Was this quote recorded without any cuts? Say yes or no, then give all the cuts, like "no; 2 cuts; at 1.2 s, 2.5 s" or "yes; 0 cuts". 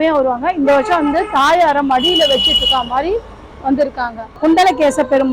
no; 1 cut; at 4.4 s